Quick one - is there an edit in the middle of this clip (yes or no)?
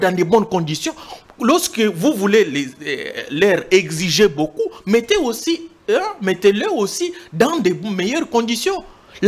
no